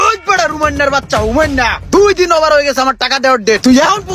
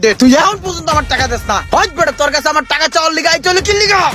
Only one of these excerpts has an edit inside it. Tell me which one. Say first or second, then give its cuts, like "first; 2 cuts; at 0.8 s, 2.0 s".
second; 1 cut; at 1.6 s